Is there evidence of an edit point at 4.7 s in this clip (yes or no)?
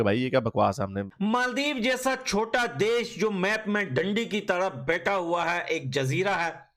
no